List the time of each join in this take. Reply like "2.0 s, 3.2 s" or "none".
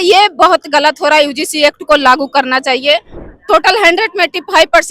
3.1 s